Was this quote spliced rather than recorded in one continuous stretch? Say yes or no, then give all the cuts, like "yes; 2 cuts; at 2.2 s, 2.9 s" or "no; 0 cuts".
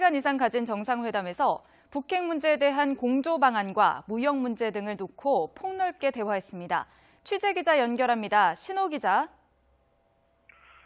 no; 0 cuts